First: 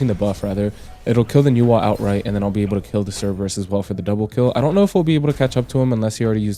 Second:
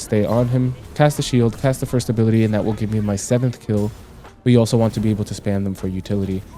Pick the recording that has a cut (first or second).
second